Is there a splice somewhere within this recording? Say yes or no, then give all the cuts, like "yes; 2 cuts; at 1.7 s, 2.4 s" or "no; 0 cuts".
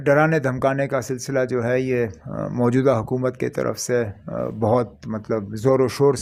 no; 0 cuts